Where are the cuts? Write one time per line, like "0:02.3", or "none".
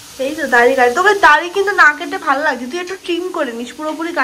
none